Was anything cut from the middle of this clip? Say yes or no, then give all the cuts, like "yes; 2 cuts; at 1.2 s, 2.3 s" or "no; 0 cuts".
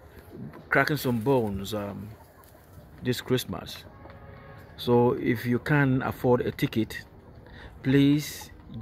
no; 0 cuts